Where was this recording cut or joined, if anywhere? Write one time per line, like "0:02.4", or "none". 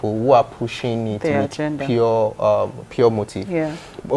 none